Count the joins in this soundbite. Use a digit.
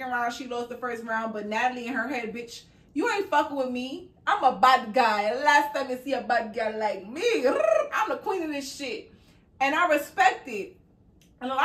0